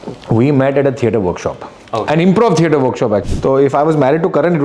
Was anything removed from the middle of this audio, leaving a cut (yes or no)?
yes